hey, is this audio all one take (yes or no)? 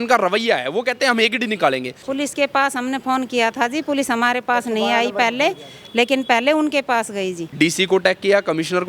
no